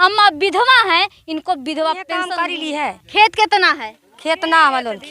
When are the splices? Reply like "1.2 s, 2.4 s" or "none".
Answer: 2.4 s